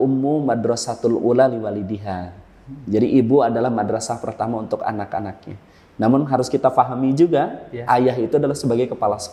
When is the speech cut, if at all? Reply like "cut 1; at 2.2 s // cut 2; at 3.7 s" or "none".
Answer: none